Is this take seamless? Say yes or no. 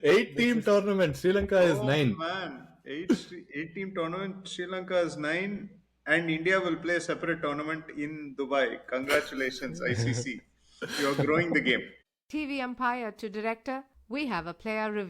no